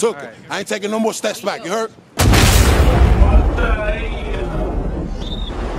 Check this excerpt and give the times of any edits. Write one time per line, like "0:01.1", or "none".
0:02.0